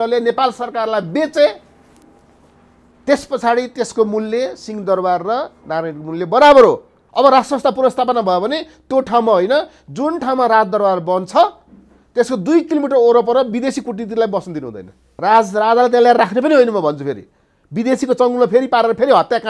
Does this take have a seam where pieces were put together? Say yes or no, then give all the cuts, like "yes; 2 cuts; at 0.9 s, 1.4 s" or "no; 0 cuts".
yes; 2 cuts; at 6.9 s, 15.0 s